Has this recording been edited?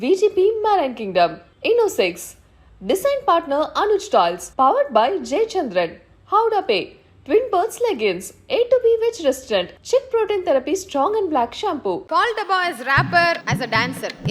yes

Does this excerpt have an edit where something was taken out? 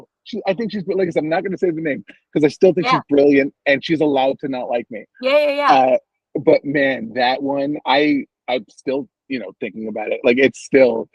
no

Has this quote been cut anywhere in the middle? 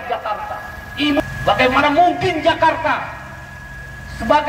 yes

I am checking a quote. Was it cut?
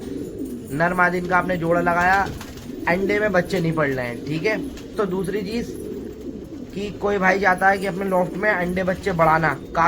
yes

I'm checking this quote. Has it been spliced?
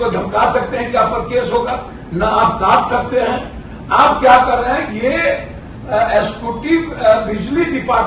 no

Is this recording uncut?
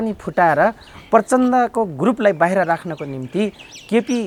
yes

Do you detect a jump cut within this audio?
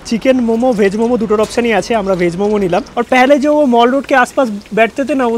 yes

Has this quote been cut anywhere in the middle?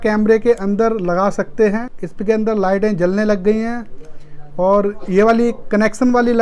yes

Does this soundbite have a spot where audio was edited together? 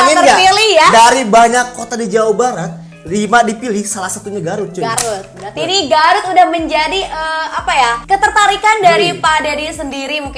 no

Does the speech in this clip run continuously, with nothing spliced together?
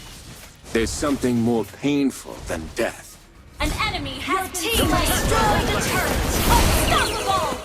yes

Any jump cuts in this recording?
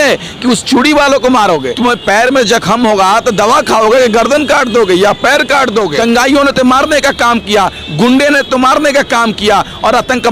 yes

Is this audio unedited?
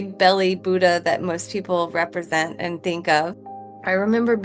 no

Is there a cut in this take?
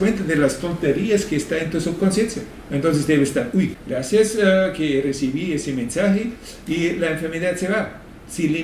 yes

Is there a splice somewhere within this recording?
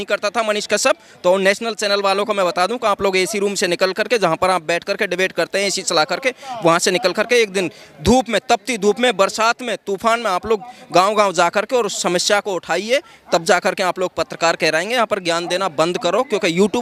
no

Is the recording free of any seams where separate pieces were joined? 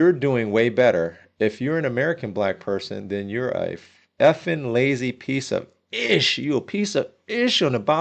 yes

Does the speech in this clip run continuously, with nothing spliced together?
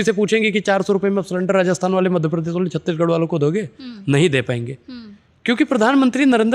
yes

